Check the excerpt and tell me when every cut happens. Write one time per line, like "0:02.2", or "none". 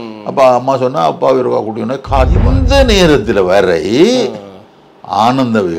0:02.5